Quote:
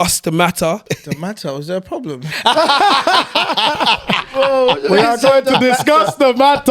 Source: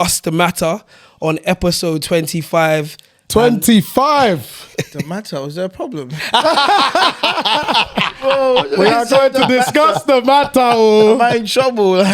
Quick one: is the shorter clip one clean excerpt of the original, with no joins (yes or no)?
no